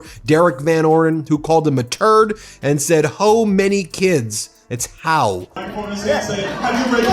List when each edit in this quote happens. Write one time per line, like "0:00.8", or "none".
0:05.5